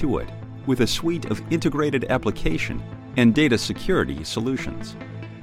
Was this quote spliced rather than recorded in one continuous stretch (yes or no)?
no